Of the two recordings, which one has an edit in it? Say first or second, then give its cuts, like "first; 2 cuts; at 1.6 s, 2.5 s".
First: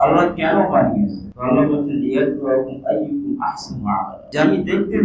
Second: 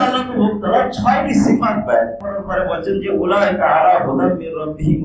second; 1 cut; at 2.2 s